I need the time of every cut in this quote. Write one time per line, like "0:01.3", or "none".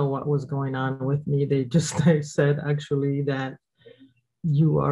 none